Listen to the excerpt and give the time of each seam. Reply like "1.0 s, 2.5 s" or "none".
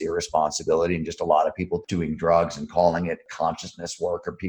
1.8 s, 3.2 s